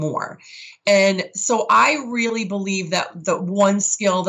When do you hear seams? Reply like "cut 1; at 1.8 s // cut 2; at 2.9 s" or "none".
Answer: none